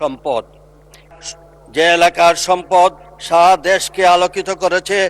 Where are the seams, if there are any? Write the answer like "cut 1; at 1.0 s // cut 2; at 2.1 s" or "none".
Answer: cut 1; at 1.0 s